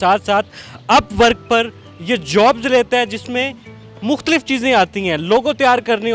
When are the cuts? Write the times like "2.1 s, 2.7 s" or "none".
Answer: none